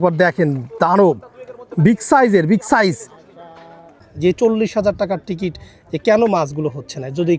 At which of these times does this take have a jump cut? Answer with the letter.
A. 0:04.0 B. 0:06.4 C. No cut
A